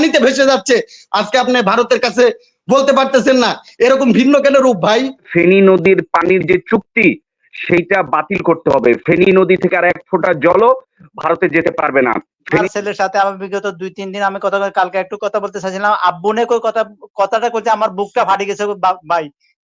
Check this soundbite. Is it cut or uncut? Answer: cut